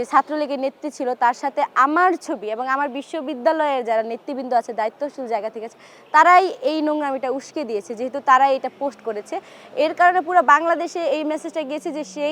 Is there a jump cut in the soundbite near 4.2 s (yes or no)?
no